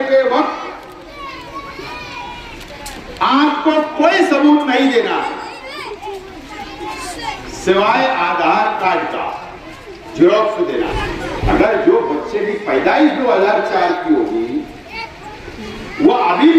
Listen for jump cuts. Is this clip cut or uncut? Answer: cut